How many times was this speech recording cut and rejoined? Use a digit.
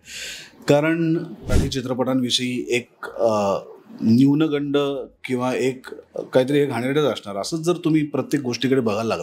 1